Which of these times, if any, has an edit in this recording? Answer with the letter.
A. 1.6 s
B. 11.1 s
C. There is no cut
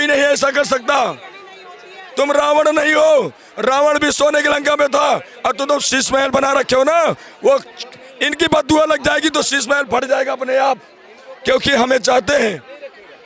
C